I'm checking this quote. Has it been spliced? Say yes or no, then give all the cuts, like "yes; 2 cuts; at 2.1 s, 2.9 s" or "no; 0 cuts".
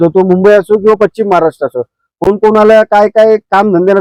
no; 0 cuts